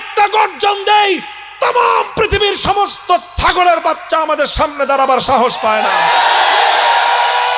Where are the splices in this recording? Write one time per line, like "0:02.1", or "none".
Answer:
none

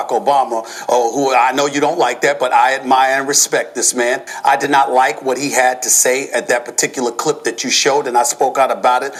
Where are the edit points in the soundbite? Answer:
none

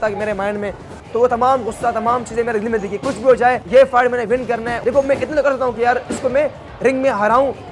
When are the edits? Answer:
0:03.6
0:04.7

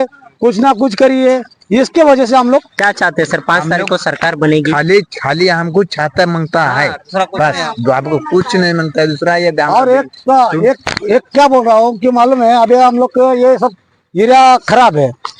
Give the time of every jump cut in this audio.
none

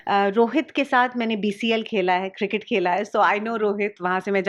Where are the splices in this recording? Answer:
none

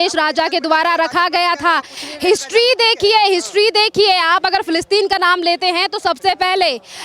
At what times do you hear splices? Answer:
none

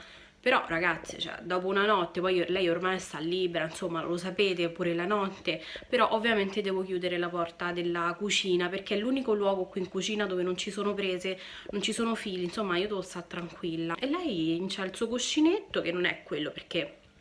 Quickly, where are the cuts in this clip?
0:14.0

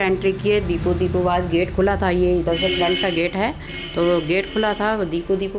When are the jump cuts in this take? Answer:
none

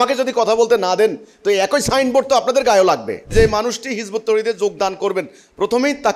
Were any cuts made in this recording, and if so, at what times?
0:03.3

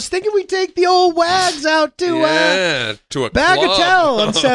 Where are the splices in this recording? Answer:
none

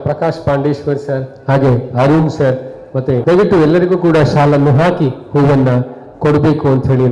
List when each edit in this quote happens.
0:03.2

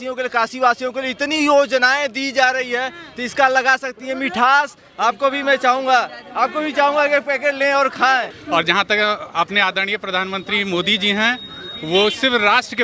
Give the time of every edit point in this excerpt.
0:08.4

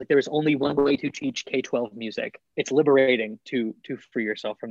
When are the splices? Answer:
0:02.4

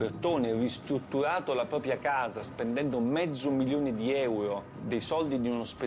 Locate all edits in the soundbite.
0:04.7

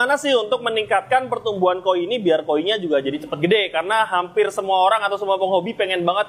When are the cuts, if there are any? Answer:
none

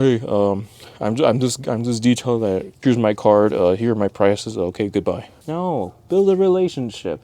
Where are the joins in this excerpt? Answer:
0:02.7
0:05.3

